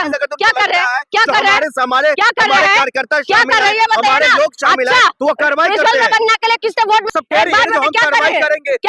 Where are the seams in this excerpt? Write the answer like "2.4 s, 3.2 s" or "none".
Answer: 7.1 s